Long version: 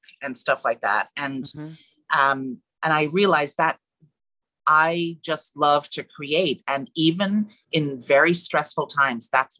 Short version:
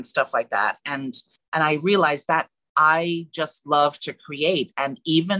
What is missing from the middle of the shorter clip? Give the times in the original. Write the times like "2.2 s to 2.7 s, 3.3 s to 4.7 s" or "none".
1.7 s to 2.6 s, 3.9 s to 4.5 s